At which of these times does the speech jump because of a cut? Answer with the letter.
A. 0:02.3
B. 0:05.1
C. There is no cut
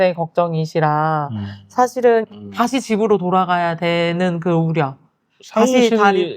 A